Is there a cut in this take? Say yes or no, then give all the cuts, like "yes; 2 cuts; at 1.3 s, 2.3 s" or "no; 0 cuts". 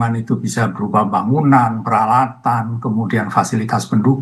no; 0 cuts